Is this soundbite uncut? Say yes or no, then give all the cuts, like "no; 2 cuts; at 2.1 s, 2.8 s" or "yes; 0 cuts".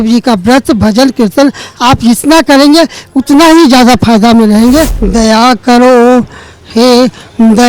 no; 1 cut; at 5.0 s